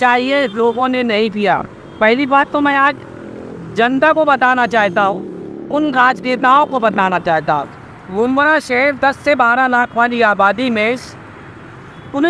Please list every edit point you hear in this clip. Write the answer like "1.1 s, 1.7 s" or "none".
none